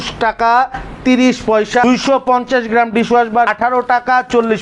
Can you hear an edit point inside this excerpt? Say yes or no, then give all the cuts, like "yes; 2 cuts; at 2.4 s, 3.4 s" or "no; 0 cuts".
yes; 2 cuts; at 1.8 s, 3.5 s